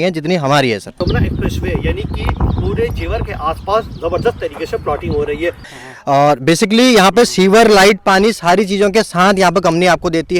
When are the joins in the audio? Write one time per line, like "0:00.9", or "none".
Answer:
0:01.0
0:05.7